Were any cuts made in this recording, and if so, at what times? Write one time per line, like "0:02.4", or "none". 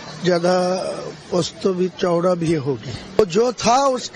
none